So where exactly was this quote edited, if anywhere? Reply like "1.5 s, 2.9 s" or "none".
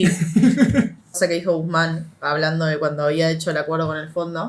1.1 s